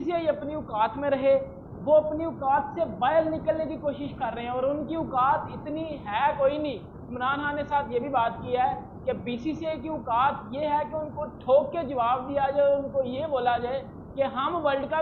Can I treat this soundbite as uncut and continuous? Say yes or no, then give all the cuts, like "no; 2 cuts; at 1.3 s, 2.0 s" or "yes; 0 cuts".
yes; 0 cuts